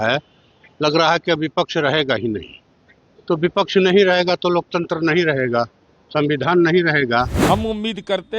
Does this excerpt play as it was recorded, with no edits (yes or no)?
no